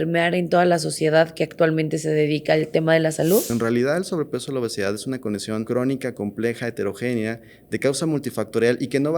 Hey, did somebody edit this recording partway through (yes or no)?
yes